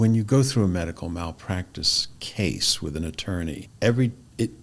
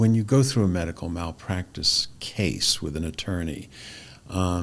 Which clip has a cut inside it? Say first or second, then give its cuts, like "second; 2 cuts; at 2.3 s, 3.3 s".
first; 1 cut; at 3.7 s